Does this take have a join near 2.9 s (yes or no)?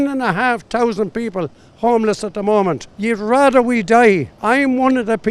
yes